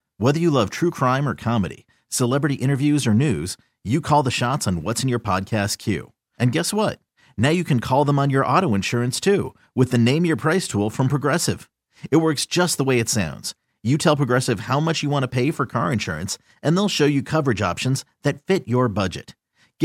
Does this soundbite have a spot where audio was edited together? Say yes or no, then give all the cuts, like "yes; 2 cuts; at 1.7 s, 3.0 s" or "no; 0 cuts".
no; 0 cuts